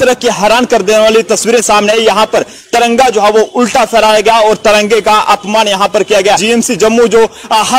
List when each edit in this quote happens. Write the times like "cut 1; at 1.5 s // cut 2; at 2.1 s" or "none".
cut 1; at 6.4 s